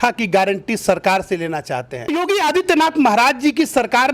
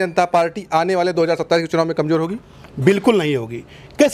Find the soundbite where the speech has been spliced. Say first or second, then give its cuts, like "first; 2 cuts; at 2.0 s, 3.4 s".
first; 1 cut; at 2.1 s